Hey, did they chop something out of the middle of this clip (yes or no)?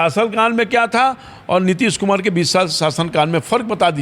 no